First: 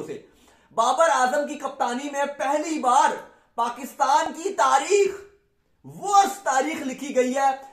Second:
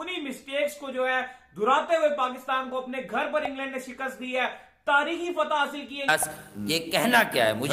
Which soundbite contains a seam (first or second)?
second